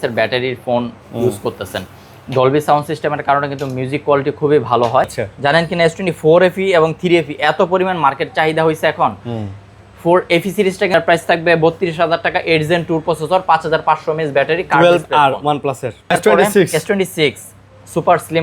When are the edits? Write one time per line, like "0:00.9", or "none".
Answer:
0:05.2
0:10.9
0:16.1